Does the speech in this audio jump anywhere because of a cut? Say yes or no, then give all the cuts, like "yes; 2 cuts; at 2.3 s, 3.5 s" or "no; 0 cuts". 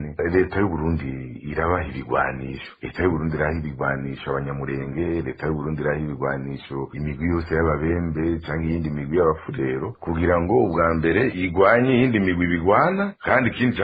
no; 0 cuts